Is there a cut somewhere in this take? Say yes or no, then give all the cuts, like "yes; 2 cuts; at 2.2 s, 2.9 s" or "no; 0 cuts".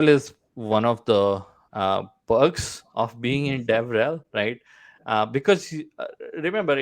no; 0 cuts